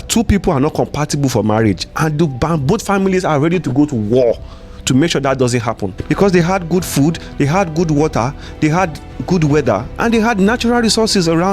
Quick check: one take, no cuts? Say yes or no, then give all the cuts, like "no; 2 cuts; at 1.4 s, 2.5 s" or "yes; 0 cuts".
no; 1 cut; at 5.9 s